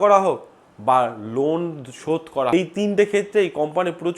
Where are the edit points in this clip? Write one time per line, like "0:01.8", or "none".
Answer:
0:02.5